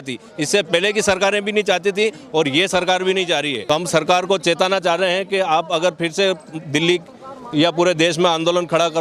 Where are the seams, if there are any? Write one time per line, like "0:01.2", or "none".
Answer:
0:03.6